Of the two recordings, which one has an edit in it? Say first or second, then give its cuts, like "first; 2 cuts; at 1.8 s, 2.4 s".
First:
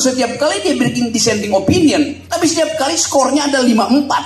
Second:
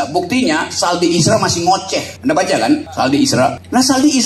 second; 2 cuts; at 2.0 s, 2.9 s